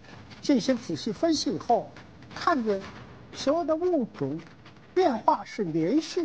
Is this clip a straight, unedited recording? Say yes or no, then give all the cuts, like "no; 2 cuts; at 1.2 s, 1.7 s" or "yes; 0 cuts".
yes; 0 cuts